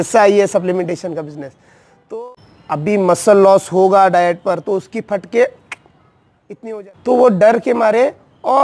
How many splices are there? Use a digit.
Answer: 2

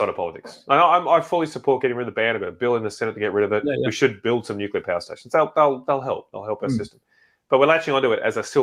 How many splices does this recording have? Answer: 0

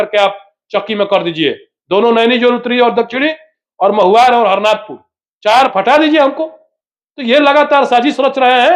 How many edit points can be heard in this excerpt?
1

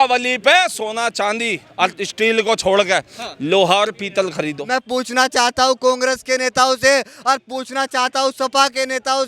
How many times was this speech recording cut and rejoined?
1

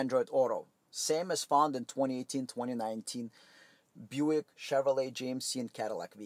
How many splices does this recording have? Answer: 0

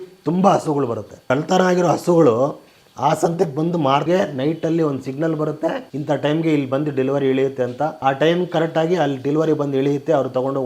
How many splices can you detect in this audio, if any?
2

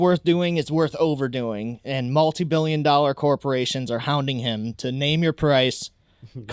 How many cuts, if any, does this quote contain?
0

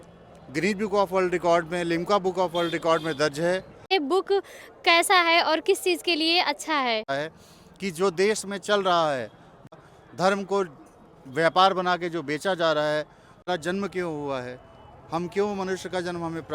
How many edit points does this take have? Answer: 4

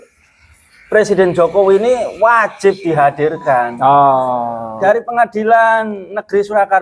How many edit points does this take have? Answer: 1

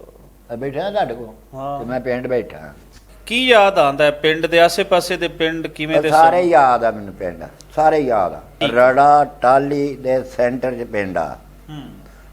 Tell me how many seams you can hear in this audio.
2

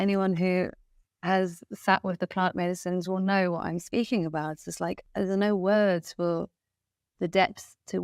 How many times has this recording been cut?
1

